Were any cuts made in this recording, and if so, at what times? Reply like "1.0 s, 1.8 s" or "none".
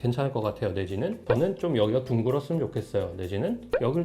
1.2 s